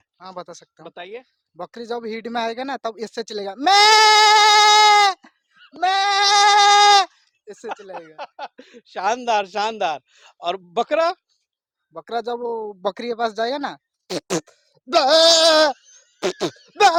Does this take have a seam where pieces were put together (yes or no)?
no